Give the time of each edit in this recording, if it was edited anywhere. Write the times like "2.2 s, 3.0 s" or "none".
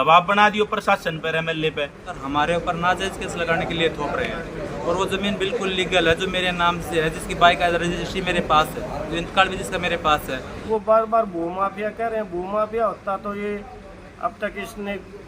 2.1 s, 10.6 s